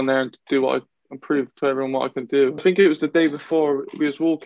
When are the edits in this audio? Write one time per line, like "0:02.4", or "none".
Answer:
0:02.6